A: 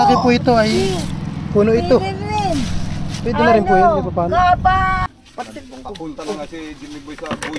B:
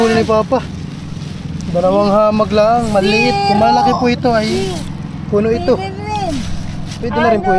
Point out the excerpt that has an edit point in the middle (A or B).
A